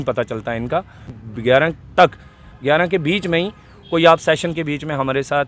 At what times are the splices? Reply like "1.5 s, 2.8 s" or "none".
1.1 s